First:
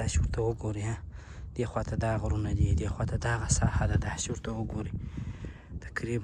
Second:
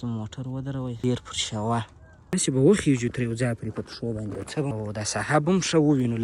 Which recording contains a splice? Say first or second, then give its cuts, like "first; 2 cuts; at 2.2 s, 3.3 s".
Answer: second; 3 cuts; at 1.0 s, 2.3 s, 4.7 s